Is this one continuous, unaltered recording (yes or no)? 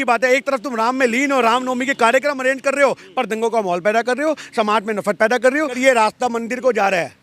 no